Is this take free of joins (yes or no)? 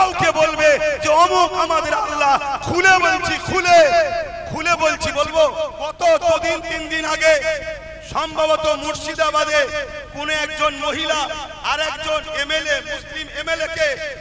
no